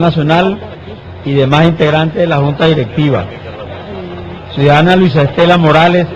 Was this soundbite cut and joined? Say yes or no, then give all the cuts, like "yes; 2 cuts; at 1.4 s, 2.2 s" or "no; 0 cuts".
yes; 1 cut; at 2.1 s